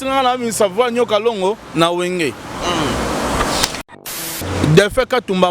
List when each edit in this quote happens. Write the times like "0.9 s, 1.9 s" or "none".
3.9 s